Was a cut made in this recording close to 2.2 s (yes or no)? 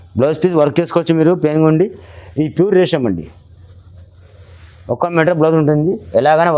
no